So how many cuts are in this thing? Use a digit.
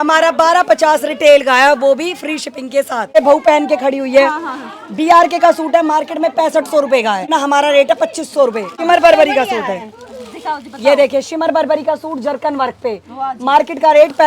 3